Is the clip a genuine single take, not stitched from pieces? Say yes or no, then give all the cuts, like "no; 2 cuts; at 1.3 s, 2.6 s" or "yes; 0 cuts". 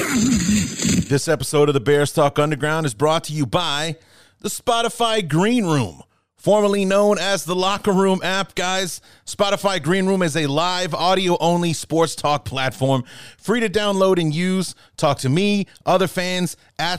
no; 1 cut; at 1.0 s